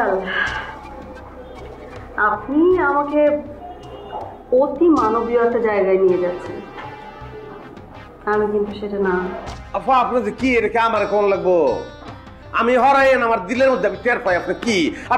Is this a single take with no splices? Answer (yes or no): yes